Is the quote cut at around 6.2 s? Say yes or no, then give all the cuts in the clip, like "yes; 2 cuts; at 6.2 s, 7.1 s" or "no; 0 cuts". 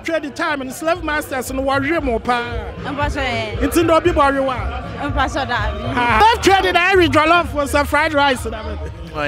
yes; 1 cut; at 6.2 s